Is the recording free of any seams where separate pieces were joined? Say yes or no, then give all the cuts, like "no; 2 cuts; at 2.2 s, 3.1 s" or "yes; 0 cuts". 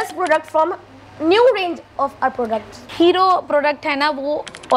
yes; 0 cuts